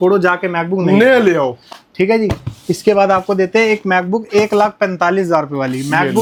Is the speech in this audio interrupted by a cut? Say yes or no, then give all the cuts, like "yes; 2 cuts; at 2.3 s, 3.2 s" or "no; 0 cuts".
no; 0 cuts